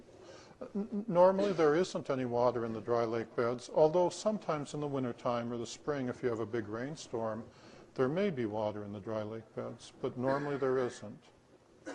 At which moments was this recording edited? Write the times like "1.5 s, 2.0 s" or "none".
4.2 s